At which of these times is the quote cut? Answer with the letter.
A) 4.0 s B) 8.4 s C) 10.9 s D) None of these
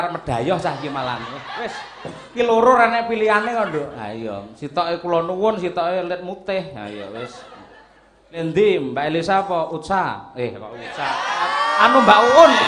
B